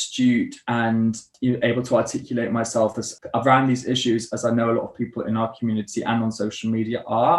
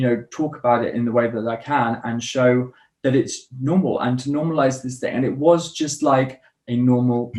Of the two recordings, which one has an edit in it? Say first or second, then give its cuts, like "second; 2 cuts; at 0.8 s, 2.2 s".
first; 2 cuts; at 1.3 s, 3.1 s